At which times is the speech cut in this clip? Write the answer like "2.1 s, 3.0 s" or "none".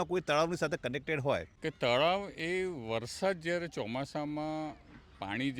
1.5 s